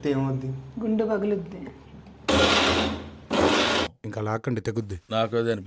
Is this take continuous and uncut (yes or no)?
no